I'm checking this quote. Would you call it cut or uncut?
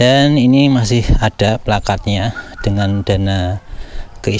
uncut